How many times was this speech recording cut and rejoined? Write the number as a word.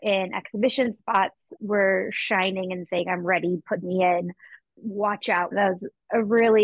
two